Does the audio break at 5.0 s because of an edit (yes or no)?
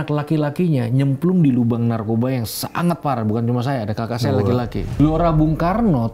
yes